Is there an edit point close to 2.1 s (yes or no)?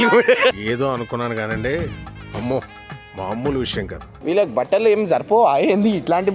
no